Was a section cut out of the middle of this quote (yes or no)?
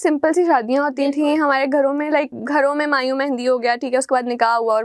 yes